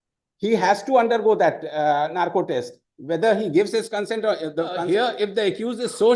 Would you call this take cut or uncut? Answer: cut